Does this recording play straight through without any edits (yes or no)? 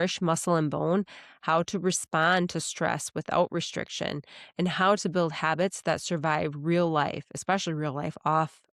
yes